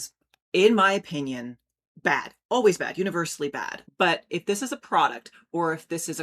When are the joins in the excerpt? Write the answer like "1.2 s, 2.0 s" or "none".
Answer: 3.7 s

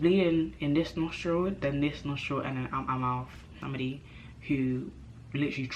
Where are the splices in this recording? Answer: 3.5 s

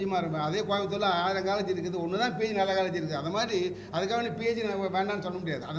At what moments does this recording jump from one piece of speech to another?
none

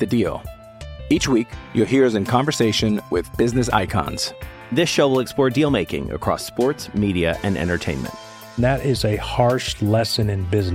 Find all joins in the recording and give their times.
none

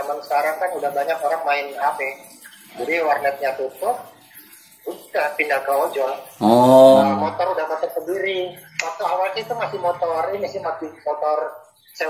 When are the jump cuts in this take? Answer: 7.0 s

